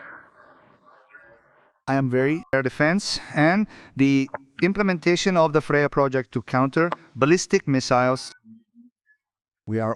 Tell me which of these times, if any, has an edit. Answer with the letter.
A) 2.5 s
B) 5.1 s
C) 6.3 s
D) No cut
A